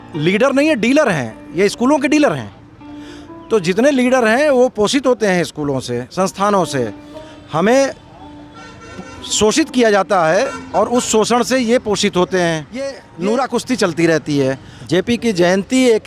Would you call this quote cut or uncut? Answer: cut